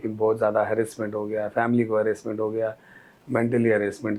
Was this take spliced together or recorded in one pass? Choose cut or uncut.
uncut